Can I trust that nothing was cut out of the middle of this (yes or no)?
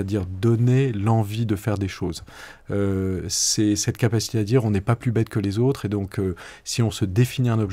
yes